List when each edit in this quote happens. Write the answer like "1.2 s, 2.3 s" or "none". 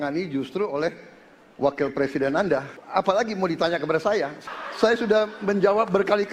2.8 s, 4.4 s

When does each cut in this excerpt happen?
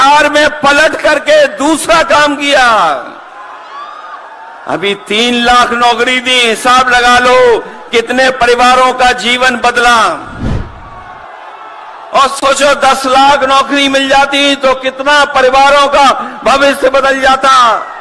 none

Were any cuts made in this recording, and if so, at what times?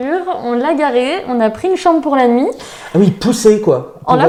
none

